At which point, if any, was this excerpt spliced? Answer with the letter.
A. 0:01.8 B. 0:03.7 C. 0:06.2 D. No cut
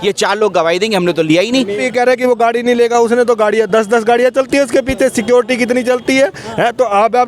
A